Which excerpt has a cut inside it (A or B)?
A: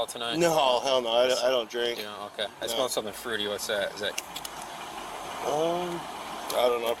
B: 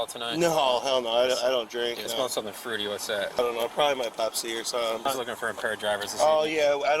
B